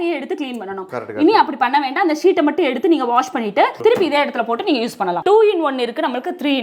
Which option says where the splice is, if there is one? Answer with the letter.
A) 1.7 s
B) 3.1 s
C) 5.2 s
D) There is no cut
C